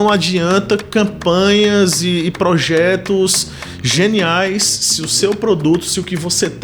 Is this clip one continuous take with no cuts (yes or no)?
yes